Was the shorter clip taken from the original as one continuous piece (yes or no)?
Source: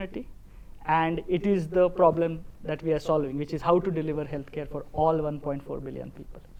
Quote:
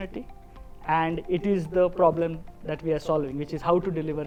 yes